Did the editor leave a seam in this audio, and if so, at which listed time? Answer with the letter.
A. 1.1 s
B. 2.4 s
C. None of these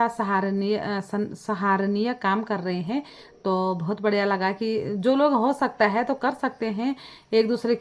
C